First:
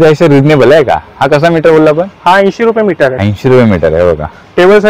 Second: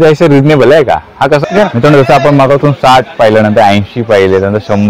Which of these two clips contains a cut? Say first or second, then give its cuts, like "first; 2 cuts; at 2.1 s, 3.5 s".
second; 1 cut; at 1.4 s